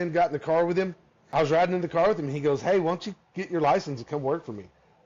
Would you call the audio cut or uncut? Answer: cut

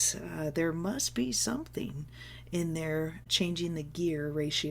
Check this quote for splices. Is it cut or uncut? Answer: cut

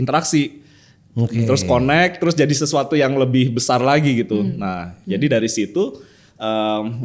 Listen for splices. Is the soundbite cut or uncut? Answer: uncut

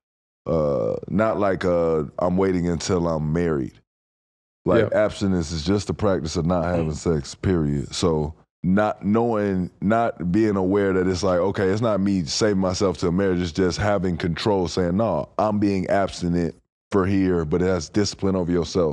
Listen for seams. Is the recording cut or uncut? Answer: cut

